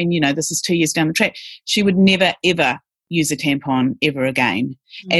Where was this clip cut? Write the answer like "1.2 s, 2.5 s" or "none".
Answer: none